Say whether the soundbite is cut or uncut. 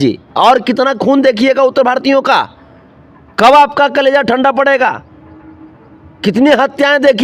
uncut